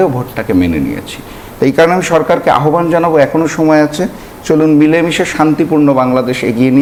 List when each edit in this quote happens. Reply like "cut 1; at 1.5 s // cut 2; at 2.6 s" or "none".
none